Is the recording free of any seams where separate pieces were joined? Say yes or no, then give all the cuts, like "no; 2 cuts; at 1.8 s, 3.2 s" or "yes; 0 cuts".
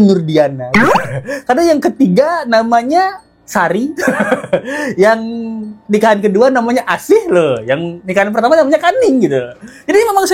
yes; 0 cuts